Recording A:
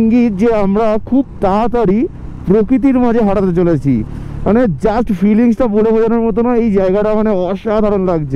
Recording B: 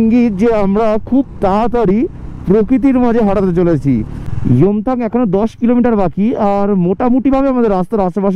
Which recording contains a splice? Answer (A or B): B